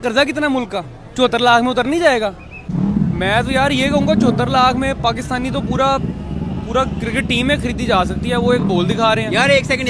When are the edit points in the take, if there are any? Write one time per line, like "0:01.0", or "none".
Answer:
0:01.0
0:02.5